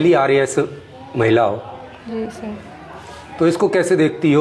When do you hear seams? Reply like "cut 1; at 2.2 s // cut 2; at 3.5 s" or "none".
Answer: none